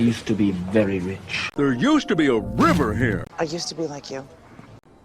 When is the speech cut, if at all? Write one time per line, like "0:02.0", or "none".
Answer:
0:03.3